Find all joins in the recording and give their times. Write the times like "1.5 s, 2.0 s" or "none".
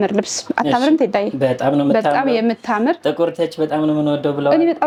none